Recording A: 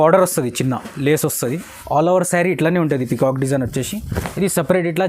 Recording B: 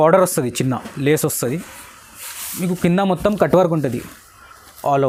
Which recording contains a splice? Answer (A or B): A